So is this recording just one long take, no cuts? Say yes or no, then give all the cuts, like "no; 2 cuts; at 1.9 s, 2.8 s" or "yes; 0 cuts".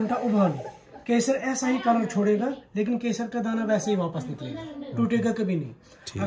yes; 0 cuts